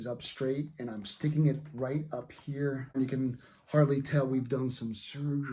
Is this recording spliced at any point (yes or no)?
yes